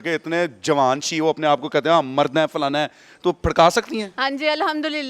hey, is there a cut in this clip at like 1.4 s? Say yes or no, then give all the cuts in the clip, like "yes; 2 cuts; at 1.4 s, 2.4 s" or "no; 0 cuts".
no; 1 cut; at 4.1 s